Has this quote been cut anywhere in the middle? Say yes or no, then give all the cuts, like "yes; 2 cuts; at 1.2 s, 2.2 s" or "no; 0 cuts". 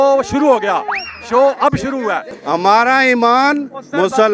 yes; 1 cut; at 2.3 s